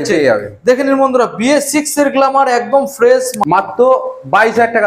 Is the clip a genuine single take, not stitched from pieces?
no; 1 cut; at 3.3 s

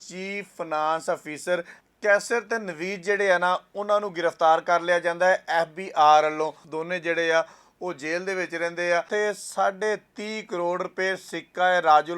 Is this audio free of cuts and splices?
no; 2 cuts; at 6.7 s, 9.1 s

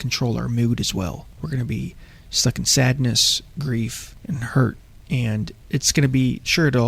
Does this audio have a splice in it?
yes; 2 cuts; at 1.3 s, 4.1 s

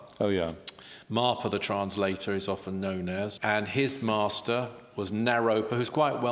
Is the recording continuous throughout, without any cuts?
no; 1 cut; at 3.3 s

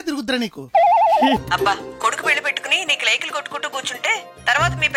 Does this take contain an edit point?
yes; 1 cut; at 1.4 s

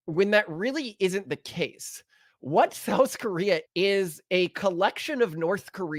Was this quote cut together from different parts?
no; 0 cuts

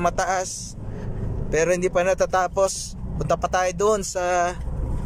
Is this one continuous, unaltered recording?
yes; 0 cuts

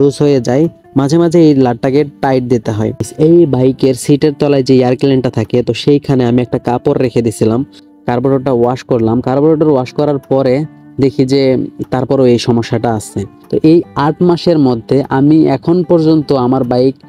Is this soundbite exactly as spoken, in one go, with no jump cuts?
no; 3 cuts; at 3.1 s, 7.8 s, 13.3 s

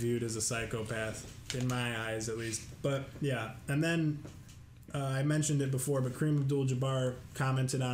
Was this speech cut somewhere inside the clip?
no; 0 cuts

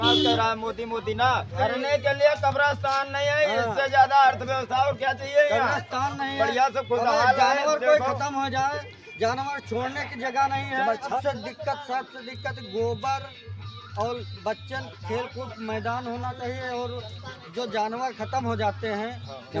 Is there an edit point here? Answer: yes; 2 cuts; at 1.6 s, 11.2 s

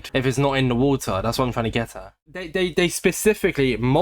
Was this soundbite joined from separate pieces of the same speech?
yes; 1 cut; at 2.2 s

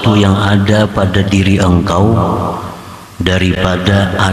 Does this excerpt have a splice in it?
no; 0 cuts

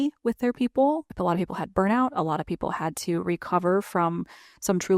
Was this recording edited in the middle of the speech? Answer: yes; 1 cut; at 1.1 s

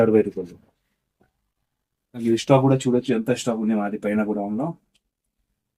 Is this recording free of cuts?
no; 1 cut; at 2.2 s

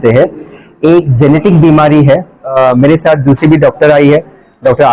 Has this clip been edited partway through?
yes; 1 cut; at 2.5 s

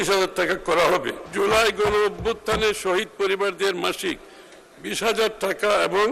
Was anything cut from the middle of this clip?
yes; 1 cut; at 1.2 s

